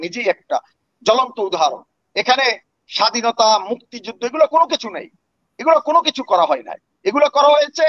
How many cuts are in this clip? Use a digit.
0